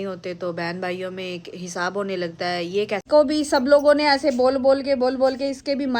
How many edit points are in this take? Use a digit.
1